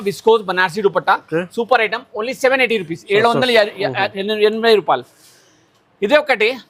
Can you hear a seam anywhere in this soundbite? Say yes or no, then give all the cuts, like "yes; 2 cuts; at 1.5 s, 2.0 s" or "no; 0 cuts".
no; 0 cuts